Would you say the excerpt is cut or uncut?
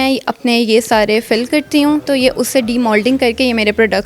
cut